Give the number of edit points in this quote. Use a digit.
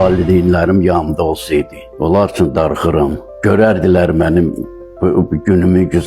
2